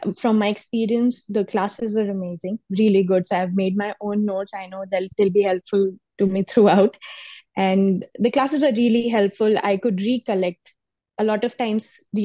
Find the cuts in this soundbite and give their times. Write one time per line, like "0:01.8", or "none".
none